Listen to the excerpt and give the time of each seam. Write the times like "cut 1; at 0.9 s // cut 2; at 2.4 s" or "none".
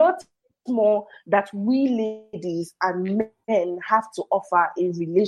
cut 1; at 3.4 s